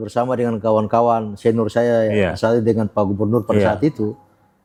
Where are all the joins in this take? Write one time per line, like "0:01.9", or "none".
none